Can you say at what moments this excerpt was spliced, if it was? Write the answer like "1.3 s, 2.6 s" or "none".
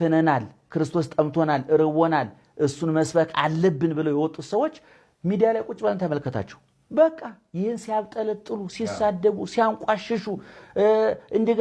none